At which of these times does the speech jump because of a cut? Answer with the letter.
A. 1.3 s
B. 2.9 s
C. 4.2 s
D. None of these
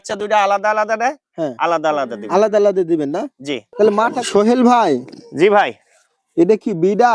C